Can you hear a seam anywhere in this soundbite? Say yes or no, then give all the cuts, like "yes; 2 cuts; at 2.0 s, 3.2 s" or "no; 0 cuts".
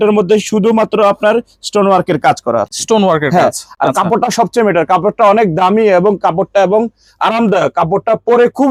no; 0 cuts